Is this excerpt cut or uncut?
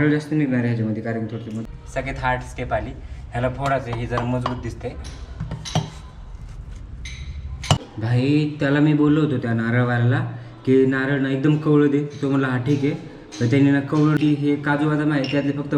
cut